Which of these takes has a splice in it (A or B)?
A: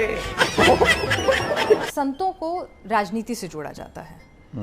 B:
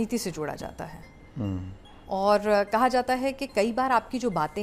A